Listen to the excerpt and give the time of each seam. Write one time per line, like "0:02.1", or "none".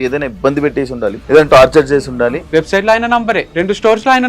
0:01.2
0:02.4
0:03.5